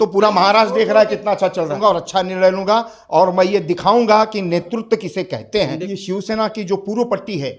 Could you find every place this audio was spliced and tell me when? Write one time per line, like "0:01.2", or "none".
0:01.8
0:05.8